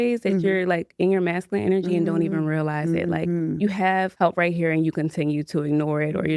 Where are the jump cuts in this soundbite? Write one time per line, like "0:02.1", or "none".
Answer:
0:04.1